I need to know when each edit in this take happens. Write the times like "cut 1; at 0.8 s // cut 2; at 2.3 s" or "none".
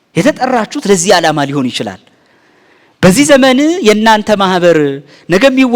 cut 1; at 2.2 s

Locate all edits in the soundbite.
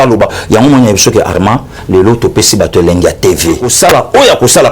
cut 1; at 3.7 s

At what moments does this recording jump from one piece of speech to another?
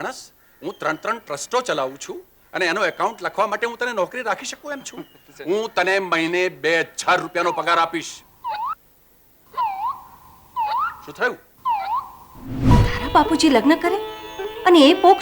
cut 1; at 12.7 s

